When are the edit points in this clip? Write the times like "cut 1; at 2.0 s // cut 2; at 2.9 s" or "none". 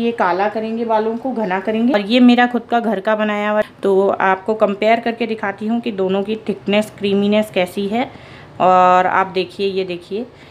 cut 1; at 3.7 s